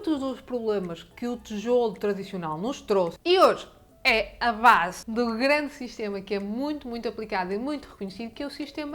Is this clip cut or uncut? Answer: cut